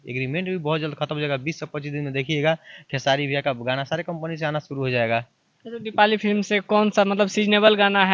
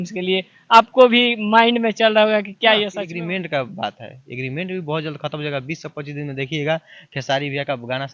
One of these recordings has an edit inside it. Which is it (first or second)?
second